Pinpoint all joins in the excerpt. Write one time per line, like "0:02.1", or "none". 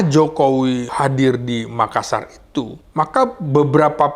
0:00.9
0:02.8